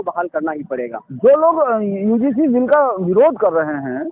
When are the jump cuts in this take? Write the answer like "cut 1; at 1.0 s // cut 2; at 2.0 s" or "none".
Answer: none